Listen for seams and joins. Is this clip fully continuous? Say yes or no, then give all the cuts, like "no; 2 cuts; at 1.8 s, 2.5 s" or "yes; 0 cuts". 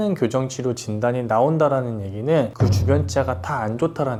yes; 0 cuts